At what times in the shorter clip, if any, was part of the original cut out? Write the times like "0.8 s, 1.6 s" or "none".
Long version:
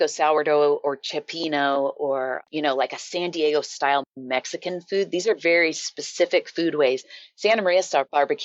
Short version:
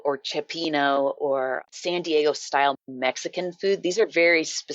1.7 s